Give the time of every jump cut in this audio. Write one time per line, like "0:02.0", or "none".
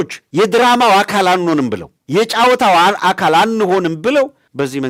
none